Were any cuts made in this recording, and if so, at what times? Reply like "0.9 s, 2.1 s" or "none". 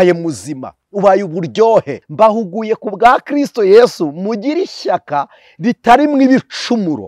2.0 s

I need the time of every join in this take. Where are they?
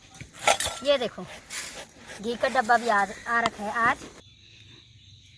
4.2 s

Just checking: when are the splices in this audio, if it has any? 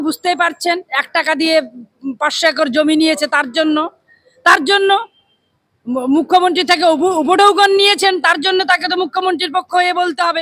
none

